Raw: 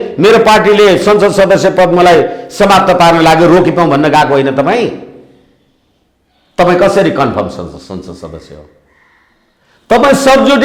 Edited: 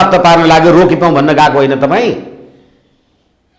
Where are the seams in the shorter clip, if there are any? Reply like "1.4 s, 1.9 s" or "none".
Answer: none